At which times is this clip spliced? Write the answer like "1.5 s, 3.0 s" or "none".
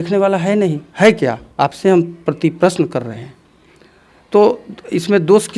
none